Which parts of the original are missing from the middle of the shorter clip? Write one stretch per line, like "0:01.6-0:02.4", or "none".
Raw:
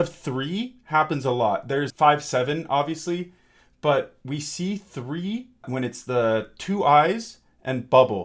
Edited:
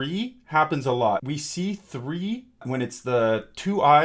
0:01.6-0:04.3

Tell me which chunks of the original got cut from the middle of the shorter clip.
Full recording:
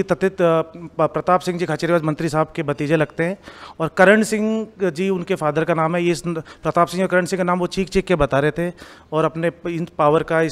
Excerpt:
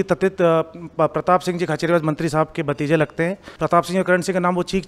0:03.5-0:06.5

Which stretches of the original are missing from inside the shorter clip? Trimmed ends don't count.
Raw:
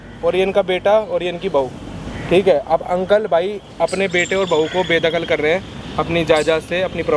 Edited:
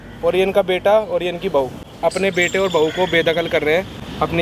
0:01.8-0:03.6

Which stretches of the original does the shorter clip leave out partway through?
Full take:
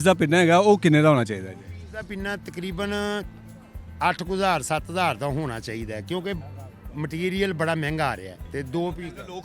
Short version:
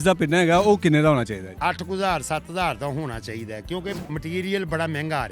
0:01.5-0:03.9
0:06.4-0:06.9

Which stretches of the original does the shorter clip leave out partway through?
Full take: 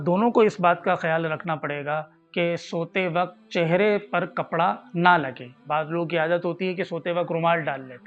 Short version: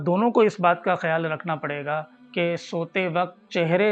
none

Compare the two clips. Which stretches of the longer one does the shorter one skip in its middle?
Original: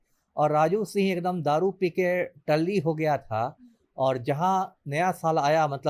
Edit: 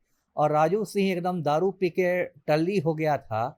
none

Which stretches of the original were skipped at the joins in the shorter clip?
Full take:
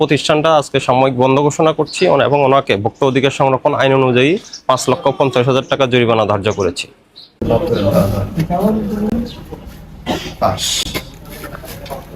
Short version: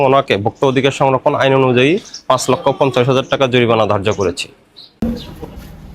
0:07.4-0:09.1

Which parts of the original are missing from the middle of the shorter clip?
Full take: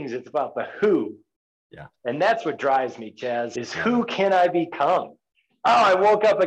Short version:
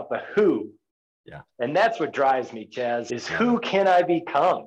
none

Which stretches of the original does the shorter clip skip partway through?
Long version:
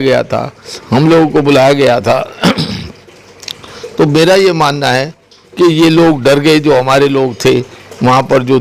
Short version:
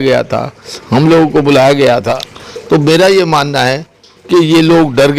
0:02.2-0:03.5

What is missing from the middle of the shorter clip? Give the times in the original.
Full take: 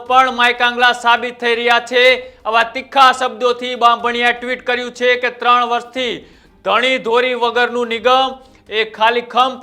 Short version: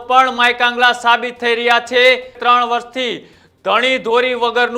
0:02.3-0:05.3

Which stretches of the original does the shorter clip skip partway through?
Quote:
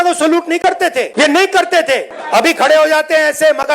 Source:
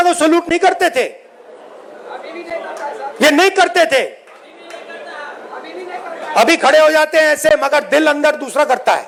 0:01.1-0:03.1
0:04.2-0:06.2

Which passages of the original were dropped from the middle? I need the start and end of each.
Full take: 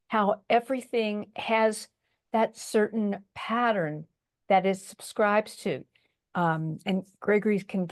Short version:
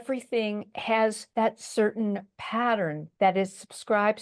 0:01.8-0:02.2
0:04.0-0:04.3

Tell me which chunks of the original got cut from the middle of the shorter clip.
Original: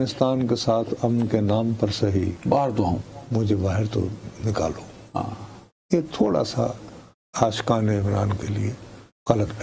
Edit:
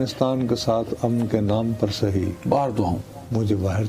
none

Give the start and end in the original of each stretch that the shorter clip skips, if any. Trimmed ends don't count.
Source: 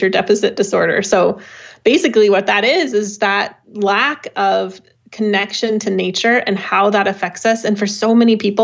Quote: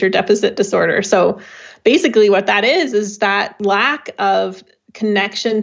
0:03.5-0:03.6

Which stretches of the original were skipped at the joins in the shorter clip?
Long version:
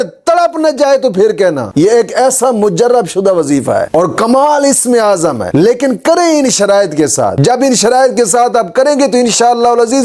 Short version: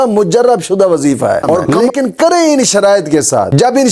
0:04.2-0:05.6

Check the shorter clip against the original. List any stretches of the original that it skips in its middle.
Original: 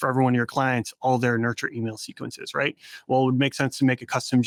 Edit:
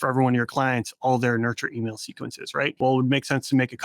0:02.7-0:03.0

